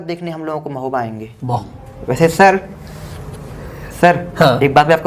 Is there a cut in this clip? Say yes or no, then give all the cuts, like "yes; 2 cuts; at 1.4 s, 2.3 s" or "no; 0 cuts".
yes; 1 cut; at 1.6 s